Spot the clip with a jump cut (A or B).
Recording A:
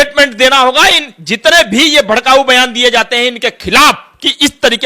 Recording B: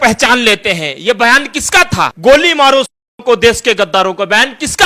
B